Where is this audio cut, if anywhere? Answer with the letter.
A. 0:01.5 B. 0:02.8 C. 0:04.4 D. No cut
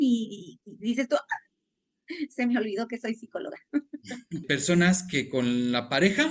C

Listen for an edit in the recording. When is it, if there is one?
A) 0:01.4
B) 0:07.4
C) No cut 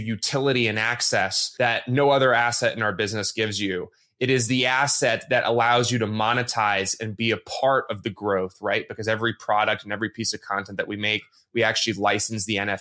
A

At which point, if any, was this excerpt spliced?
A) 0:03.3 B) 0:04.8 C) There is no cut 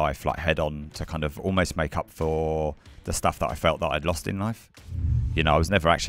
B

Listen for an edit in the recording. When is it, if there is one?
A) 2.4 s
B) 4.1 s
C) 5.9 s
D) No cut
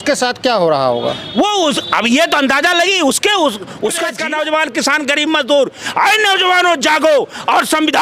B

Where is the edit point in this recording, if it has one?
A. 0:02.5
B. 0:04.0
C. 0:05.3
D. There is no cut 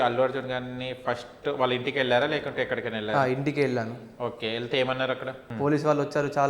C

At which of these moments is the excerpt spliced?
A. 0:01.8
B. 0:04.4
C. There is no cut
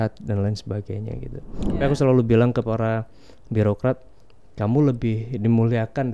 A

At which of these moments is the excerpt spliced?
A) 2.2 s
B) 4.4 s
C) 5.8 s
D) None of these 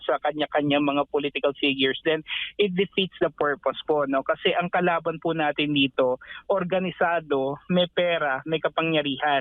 D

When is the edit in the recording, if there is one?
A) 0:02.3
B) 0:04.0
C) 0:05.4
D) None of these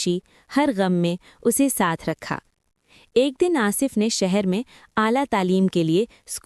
D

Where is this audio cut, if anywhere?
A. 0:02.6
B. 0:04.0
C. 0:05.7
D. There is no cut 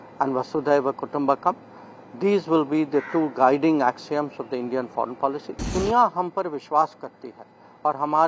C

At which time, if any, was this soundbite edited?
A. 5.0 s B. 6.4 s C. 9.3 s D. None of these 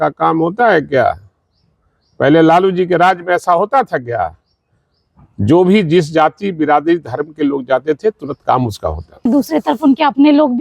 C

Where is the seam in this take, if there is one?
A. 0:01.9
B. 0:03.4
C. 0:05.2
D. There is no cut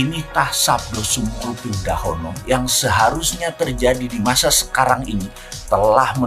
D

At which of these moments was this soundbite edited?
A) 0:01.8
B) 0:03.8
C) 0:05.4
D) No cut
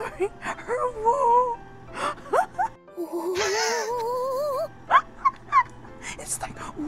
D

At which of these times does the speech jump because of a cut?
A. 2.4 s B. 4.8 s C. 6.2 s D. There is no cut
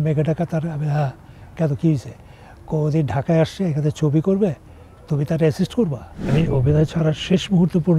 C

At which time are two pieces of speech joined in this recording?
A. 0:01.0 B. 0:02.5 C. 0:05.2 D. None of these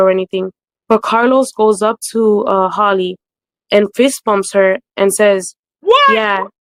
D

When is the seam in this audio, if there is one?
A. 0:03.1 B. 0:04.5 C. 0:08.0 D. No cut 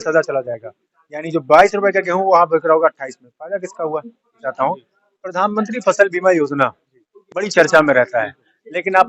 B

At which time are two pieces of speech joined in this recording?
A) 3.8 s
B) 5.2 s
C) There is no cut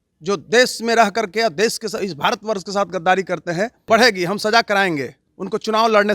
A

